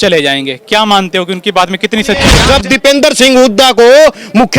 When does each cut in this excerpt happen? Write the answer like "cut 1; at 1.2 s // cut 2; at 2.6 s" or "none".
cut 1; at 2.4 s